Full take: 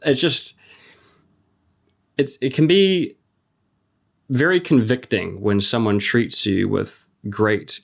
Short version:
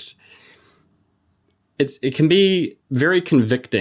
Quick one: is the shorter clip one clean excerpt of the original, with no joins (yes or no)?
no